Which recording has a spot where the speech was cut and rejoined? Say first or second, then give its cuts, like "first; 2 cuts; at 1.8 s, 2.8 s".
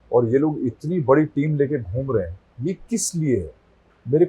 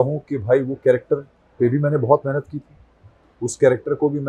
first; 1 cut; at 2.4 s